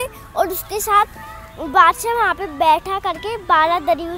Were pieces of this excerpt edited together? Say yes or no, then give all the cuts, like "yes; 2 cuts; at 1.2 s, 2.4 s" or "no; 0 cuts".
no; 0 cuts